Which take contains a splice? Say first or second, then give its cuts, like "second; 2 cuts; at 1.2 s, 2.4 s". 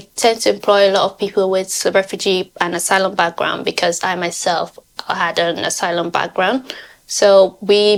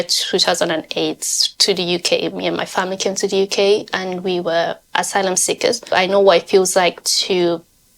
second; 1 cut; at 5.9 s